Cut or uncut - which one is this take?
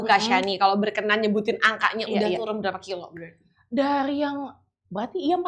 uncut